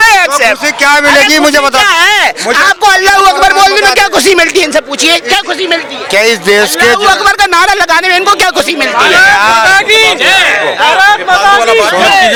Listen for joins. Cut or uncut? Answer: uncut